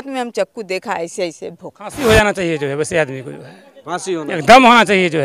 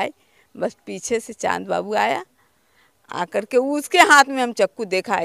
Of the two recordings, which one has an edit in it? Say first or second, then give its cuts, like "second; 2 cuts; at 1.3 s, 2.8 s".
first; 1 cut; at 1.9 s